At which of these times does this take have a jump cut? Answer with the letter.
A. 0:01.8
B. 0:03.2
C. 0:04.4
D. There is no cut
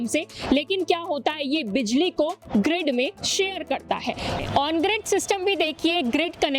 C